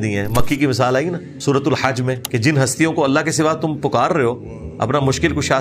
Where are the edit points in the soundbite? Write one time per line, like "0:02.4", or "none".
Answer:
0:01.3
0:02.2